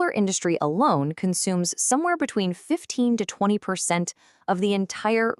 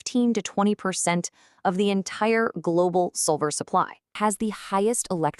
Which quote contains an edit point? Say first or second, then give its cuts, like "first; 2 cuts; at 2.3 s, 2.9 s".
second; 1 cut; at 4.2 s